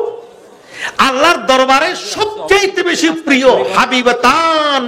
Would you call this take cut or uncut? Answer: uncut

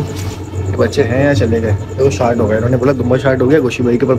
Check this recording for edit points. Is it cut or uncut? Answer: uncut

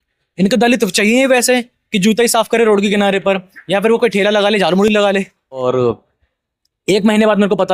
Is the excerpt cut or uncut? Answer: cut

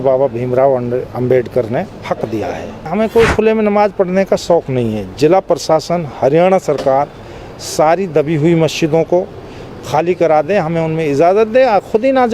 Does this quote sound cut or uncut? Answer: cut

